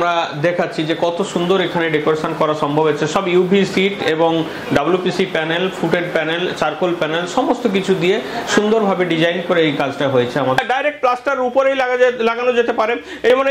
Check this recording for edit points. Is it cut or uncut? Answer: cut